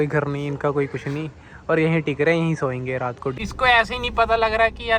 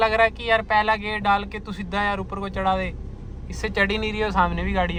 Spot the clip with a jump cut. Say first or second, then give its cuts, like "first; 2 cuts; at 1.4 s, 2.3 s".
first; 1 cut; at 3.4 s